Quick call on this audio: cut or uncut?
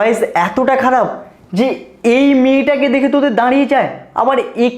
cut